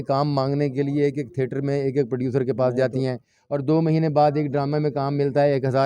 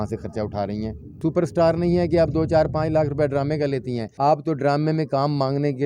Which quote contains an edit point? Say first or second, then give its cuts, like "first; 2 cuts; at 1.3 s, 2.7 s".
second; 2 cuts; at 1.1 s, 4.0 s